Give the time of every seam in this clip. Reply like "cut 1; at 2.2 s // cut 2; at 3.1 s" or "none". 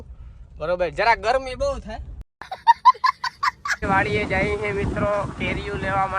cut 1; at 2.1 s // cut 2; at 3.7 s